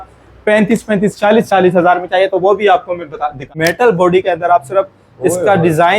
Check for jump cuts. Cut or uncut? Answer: cut